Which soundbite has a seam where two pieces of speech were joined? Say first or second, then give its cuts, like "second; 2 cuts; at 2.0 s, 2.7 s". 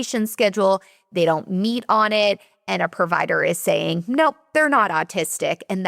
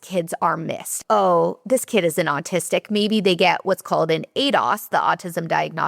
second; 1 cut; at 1.0 s